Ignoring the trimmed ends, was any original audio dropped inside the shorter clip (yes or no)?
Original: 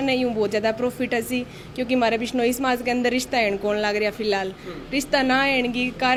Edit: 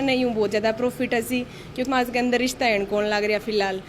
yes